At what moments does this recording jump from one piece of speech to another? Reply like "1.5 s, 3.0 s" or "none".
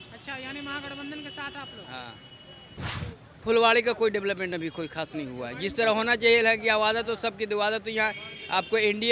2.7 s